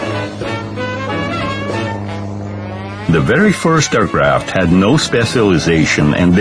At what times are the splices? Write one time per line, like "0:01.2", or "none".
0:01.3